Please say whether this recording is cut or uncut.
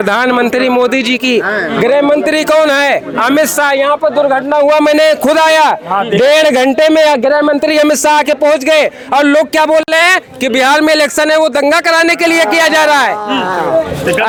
uncut